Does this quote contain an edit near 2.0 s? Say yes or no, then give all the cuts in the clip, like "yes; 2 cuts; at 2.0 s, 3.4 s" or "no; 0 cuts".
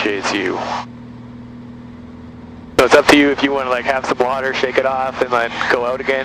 yes; 1 cut; at 2.0 s